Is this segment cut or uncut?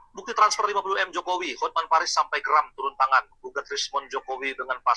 uncut